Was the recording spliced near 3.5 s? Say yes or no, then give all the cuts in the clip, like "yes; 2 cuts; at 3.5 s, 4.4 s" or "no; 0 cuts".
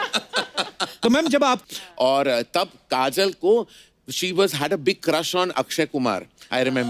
no; 1 cut; at 1.6 s